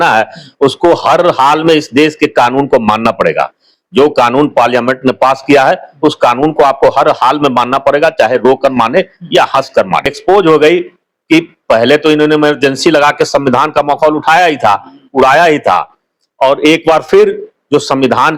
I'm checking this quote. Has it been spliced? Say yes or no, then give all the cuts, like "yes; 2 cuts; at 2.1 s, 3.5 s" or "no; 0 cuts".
yes; 1 cut; at 10.1 s